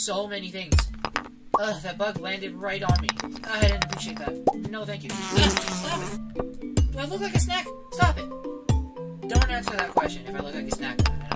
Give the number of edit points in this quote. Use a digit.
0